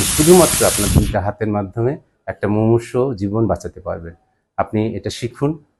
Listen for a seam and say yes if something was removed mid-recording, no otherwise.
no